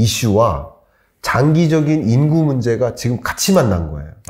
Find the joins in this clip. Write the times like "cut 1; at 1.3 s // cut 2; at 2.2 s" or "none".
none